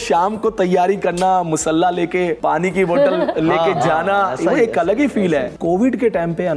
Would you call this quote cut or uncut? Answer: cut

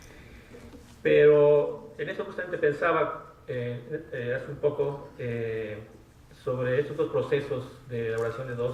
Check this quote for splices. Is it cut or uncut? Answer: uncut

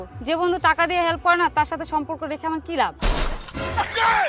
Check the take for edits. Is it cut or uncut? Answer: cut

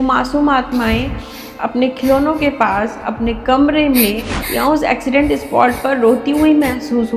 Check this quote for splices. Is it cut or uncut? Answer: uncut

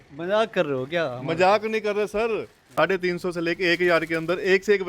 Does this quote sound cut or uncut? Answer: cut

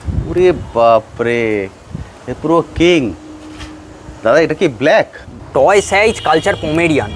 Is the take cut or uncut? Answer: cut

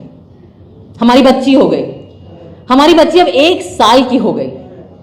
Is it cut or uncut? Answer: uncut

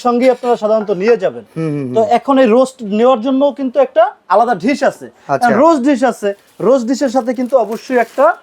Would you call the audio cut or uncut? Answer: uncut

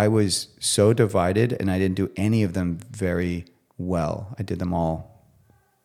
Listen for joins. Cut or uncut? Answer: uncut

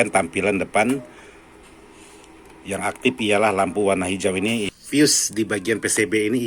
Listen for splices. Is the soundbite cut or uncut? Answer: cut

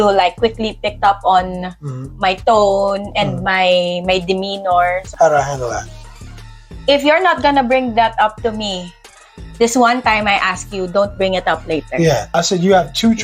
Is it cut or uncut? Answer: cut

